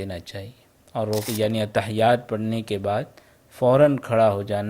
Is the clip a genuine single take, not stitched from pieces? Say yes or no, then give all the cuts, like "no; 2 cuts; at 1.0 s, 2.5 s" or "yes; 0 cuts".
no; 1 cut; at 1.2 s